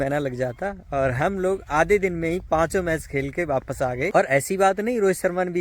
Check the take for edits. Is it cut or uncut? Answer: cut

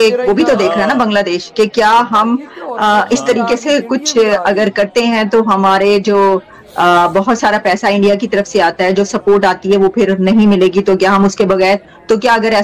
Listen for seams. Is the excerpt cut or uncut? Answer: uncut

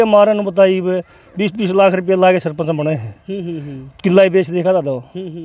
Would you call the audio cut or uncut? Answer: uncut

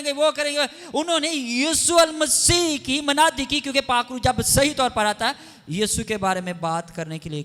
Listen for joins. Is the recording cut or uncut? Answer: uncut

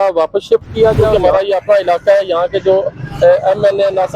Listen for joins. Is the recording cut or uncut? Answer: cut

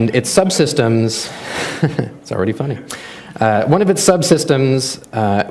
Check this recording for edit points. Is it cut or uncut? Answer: cut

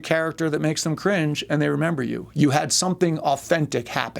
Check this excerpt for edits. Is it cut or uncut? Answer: uncut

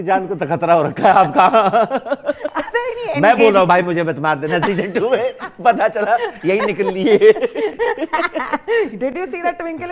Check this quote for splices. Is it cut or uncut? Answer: uncut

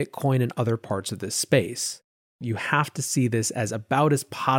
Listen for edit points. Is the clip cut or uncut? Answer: cut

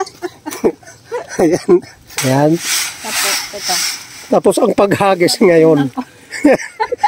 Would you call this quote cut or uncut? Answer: cut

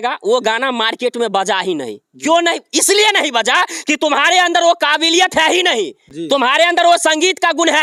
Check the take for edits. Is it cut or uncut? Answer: uncut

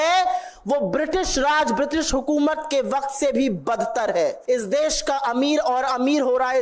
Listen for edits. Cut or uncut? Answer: cut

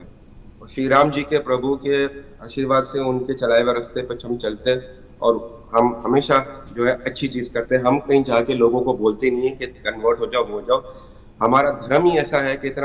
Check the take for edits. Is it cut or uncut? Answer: uncut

